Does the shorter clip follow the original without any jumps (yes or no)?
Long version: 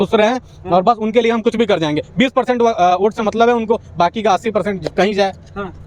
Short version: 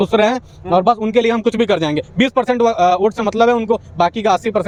yes